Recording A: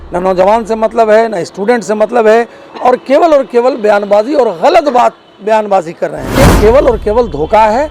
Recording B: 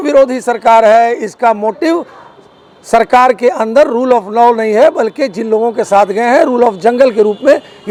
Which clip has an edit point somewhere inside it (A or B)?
A